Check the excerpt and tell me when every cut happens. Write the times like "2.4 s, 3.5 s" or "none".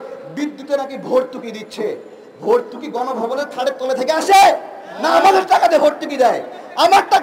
none

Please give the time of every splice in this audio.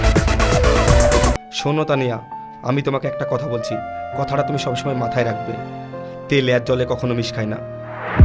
1.3 s

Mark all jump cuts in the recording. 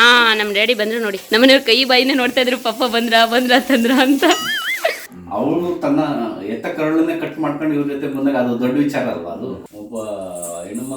1.2 s, 5.0 s, 9.6 s

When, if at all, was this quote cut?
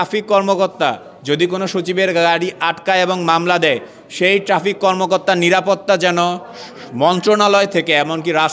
none

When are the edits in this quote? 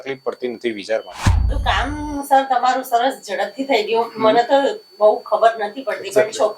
1.5 s

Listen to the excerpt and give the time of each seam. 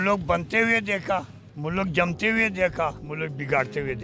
3.0 s

